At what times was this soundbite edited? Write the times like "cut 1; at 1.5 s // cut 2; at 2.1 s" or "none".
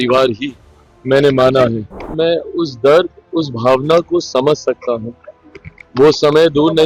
cut 1; at 2.0 s